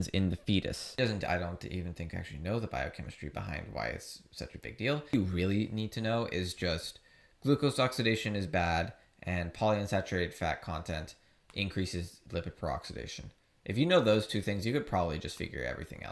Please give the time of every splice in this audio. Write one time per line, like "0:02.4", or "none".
0:01.0
0:05.1